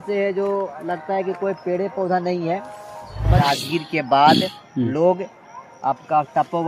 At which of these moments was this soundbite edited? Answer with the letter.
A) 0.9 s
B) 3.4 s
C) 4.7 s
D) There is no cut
B